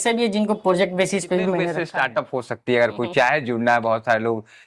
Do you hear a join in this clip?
yes; 1 cut; at 1.8 s

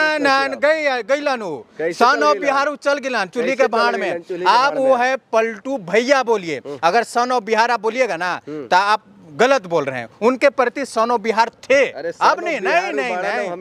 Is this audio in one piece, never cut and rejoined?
yes; 0 cuts

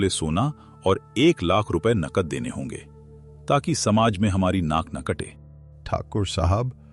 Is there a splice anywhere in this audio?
no; 0 cuts

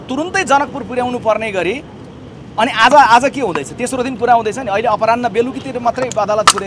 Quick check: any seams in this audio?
no; 0 cuts

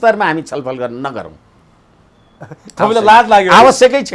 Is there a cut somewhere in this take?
no; 0 cuts

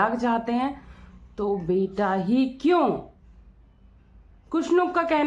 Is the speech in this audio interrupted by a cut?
no; 0 cuts

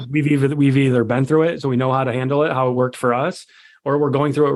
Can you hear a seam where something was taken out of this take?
no; 0 cuts

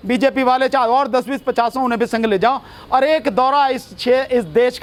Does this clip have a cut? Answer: no; 0 cuts

